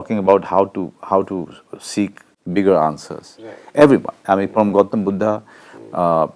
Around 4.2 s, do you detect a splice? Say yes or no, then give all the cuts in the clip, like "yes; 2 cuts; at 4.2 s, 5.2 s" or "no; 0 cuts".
no; 1 cut; at 2.2 s